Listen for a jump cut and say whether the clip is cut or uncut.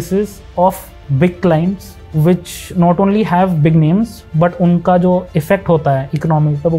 uncut